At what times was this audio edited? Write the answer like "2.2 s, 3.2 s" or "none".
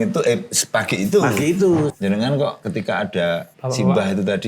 1.9 s, 2.6 s, 3.5 s